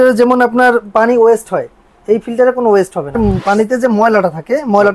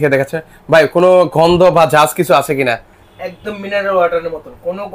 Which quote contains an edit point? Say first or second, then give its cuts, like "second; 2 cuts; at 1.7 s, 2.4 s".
first; 1 cut; at 3.2 s